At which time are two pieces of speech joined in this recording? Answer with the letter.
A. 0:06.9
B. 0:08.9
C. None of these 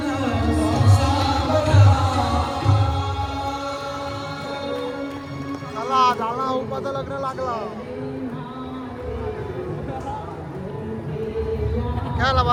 C